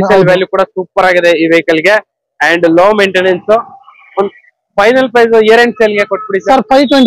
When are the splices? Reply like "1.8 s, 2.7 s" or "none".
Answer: none